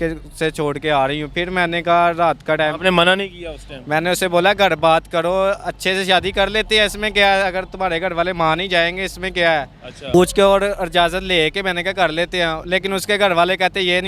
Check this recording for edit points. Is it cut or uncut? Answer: cut